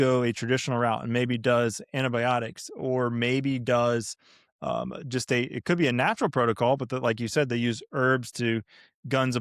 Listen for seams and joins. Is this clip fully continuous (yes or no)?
yes